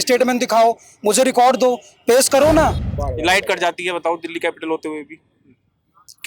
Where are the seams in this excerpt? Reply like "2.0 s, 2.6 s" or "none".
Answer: 2.9 s